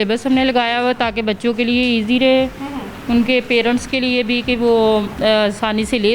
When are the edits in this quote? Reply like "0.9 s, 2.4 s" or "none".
none